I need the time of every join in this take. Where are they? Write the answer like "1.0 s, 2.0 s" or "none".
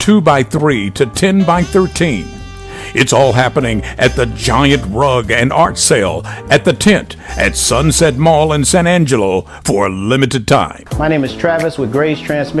10.8 s